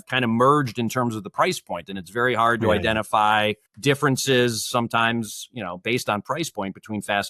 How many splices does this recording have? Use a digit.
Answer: 1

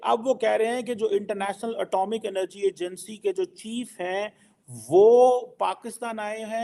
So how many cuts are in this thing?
0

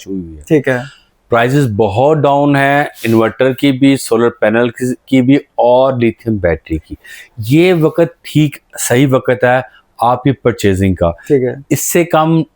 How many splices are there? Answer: 0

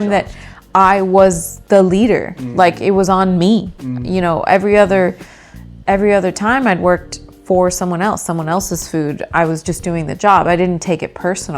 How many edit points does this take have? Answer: 1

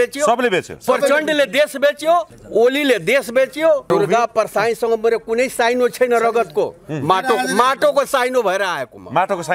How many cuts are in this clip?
2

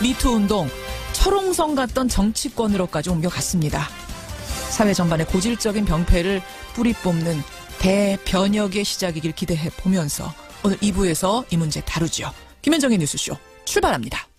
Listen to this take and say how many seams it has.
0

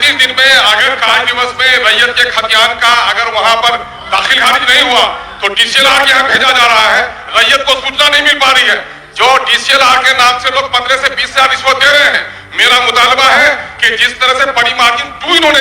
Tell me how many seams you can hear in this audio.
0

